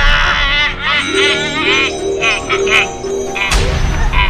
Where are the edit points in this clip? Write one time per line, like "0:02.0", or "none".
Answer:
none